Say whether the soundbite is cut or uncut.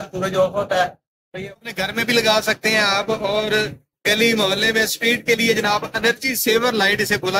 cut